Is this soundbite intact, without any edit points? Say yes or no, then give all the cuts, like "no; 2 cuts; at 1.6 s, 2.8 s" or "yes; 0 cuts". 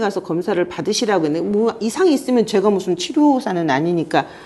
yes; 0 cuts